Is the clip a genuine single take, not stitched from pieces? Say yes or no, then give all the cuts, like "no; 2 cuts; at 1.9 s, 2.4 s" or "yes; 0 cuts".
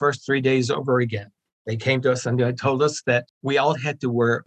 no; 2 cuts; at 1.4 s, 3.3 s